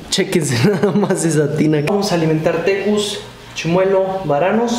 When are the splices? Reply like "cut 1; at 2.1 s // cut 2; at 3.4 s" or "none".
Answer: cut 1; at 1.9 s